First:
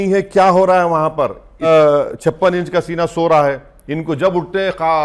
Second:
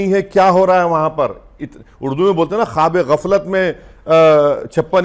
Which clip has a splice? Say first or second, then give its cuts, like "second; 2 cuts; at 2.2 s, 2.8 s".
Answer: first; 1 cut; at 1.6 s